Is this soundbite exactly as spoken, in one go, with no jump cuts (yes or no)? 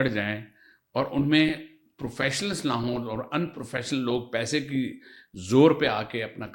yes